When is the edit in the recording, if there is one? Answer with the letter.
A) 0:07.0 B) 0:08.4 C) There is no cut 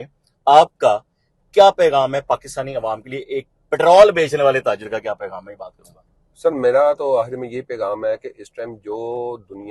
C